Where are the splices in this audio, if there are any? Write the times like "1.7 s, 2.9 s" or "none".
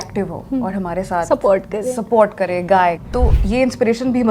3.0 s